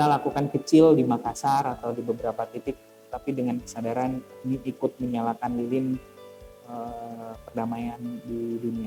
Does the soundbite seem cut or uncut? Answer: uncut